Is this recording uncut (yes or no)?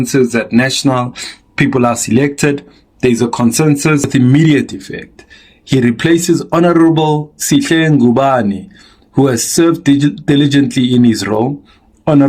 no